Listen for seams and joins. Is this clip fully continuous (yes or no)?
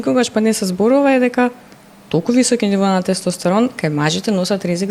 yes